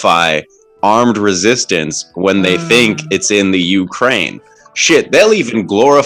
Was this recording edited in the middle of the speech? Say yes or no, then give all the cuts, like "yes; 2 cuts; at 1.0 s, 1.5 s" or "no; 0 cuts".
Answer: no; 0 cuts